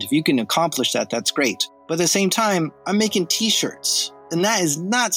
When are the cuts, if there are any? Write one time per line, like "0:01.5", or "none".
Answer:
0:01.7
0:04.2